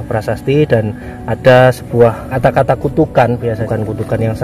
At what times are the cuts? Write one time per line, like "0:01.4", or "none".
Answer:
0:02.3
0:03.6